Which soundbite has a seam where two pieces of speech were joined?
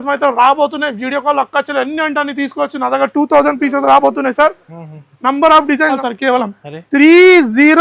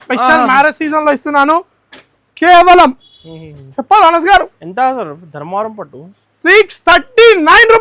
first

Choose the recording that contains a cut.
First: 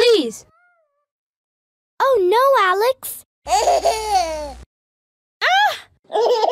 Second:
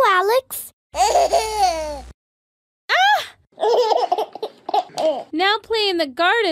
second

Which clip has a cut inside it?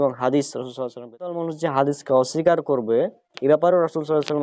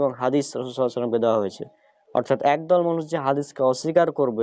first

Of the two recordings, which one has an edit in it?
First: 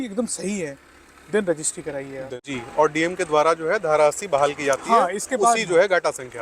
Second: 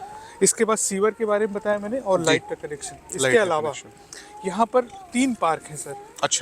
first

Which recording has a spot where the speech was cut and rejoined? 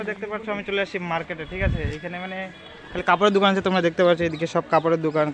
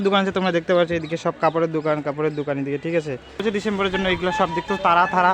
second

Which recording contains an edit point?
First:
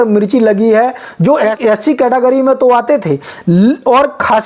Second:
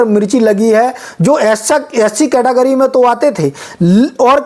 first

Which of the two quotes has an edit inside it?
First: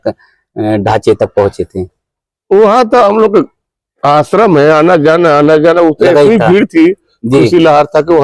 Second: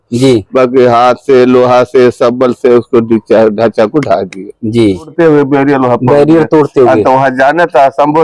second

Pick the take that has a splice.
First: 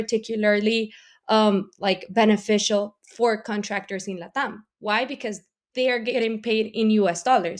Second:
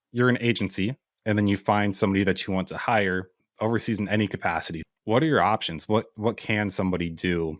second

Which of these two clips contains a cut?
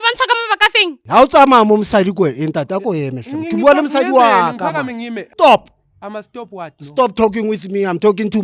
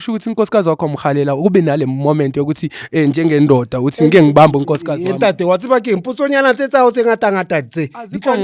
first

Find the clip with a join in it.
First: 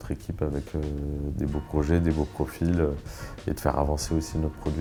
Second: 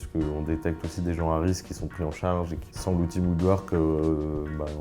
second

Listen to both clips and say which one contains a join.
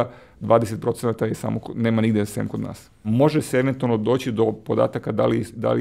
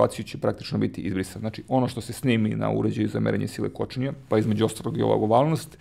first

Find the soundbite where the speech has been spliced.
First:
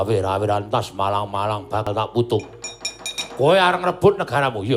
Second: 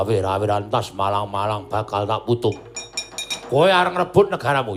first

